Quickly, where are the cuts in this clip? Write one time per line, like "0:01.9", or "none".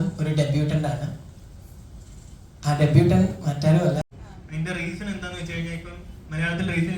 0:04.2